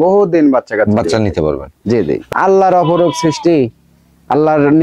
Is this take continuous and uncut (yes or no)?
no